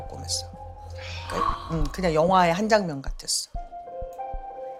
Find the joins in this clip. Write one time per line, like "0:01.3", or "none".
0:01.6